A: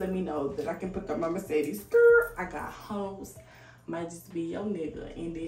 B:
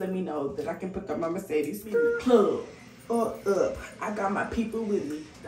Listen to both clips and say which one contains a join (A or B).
B